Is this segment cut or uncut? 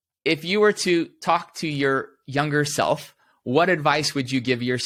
uncut